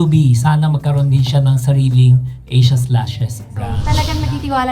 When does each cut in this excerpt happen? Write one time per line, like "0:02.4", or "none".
0:03.8